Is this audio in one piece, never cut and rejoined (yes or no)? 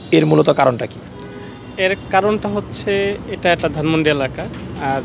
yes